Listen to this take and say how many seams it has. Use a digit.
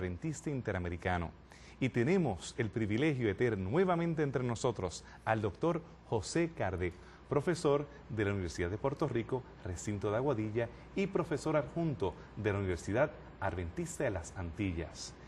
1